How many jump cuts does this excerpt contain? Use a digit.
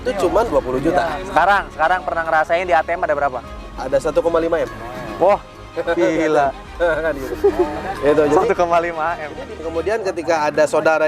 1